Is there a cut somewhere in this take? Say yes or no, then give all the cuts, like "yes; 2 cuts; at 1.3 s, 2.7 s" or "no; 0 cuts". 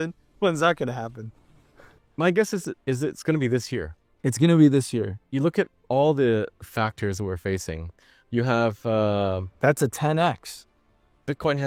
no; 0 cuts